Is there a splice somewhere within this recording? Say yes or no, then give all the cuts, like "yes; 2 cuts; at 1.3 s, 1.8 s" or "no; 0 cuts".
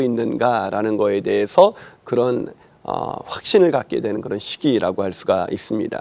no; 0 cuts